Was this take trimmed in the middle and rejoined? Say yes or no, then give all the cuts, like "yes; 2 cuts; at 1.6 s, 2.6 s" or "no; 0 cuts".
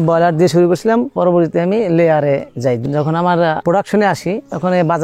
yes; 2 cuts; at 1.1 s, 2.8 s